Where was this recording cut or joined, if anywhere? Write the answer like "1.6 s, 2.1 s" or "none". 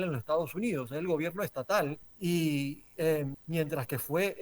2.1 s, 3.4 s

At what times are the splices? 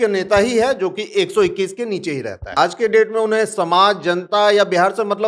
2.5 s

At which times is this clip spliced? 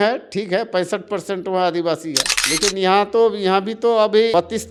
none

